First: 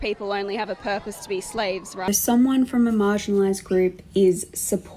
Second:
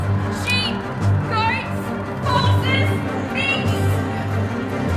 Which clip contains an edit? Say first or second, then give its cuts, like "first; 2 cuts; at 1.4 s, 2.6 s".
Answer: first; 1 cut; at 2.0 s